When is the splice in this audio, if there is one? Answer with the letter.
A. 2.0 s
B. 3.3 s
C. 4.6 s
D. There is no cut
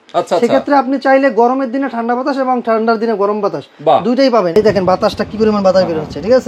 C